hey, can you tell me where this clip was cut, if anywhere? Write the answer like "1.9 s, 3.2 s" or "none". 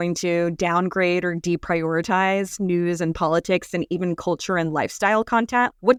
none